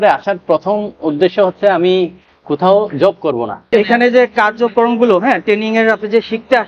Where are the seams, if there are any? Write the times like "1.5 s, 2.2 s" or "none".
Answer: 3.6 s